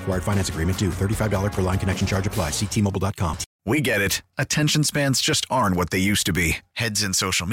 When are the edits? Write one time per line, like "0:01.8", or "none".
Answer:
0:03.5